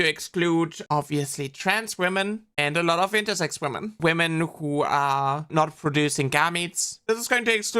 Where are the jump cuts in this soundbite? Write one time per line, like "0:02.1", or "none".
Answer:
0:03.9
0:05.4
0:06.9